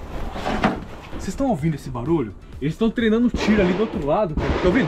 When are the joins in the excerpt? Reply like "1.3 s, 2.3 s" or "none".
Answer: 1.1 s

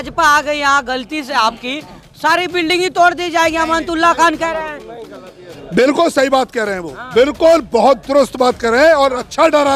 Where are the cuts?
none

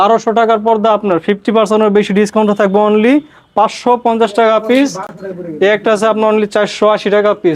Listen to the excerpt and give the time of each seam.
none

